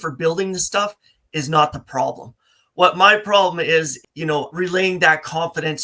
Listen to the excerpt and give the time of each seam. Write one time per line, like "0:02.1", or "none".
0:04.5